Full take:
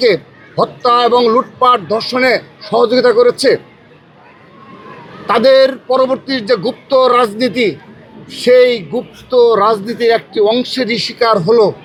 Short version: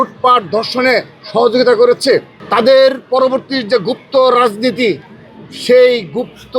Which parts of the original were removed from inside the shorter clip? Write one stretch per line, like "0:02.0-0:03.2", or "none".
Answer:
0:03.7-0:05.1